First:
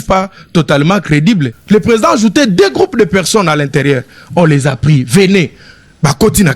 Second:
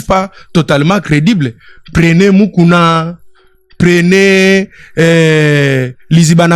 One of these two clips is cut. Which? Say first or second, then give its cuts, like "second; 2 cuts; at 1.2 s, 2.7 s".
first; 1 cut; at 1.5 s